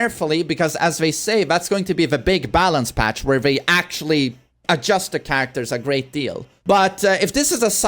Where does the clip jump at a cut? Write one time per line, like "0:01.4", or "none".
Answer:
0:06.5